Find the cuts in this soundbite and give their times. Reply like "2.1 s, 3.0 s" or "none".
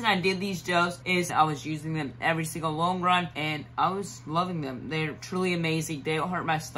1.3 s, 3.3 s